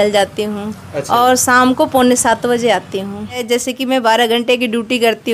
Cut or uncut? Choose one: cut